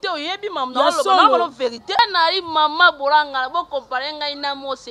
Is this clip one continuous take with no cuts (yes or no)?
no